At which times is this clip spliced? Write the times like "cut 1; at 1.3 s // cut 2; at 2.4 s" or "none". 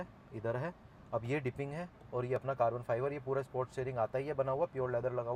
none